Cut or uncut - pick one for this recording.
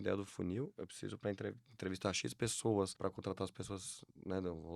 cut